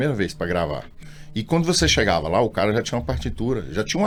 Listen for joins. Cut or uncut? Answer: uncut